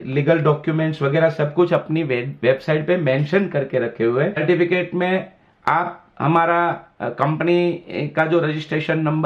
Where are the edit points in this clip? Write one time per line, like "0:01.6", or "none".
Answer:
0:04.4